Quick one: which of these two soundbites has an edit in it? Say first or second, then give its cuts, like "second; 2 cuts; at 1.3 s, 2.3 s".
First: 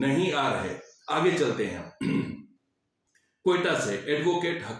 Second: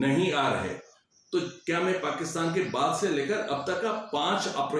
second; 1 cut; at 0.9 s